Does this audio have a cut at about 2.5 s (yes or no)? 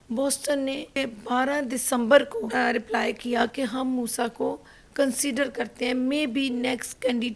yes